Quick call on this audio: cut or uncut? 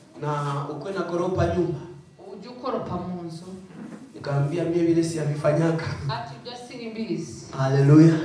uncut